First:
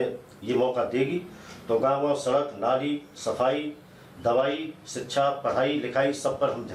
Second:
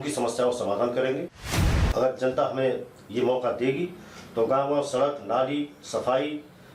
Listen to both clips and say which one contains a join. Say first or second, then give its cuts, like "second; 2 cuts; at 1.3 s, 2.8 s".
second; 1 cut; at 1.8 s